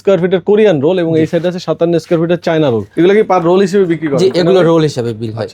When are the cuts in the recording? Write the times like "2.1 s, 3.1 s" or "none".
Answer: 2.9 s